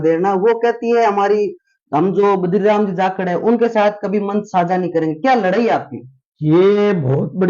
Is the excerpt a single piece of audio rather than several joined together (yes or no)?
yes